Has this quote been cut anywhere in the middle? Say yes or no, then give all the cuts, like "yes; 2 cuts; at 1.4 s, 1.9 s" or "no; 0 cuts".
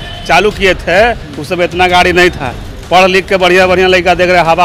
no; 0 cuts